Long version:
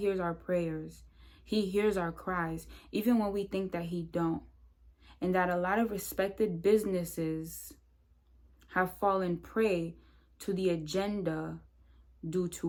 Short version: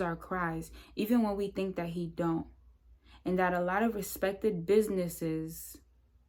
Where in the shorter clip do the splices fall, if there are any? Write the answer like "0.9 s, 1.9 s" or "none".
none